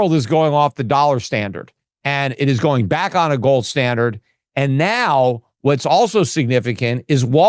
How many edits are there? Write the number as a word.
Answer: zero